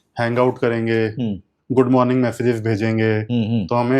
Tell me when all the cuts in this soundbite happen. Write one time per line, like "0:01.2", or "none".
0:01.5

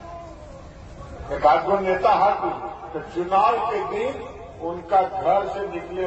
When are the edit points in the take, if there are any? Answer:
none

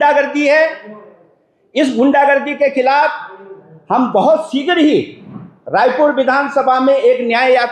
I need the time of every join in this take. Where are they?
none

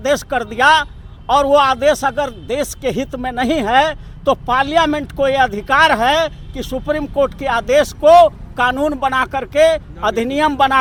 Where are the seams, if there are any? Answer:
none

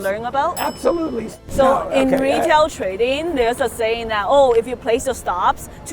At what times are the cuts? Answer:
0:01.3

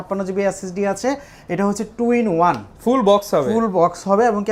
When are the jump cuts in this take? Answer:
none

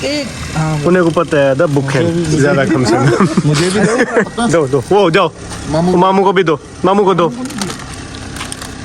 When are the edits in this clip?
0:03.3
0:04.3

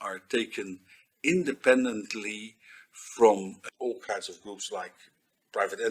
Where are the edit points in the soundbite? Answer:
0:03.6

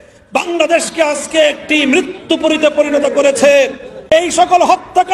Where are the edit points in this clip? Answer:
0:04.1

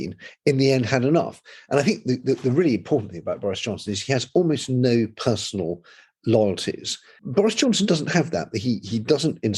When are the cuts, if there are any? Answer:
0:07.2

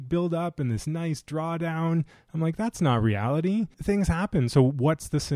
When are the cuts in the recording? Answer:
0:03.7

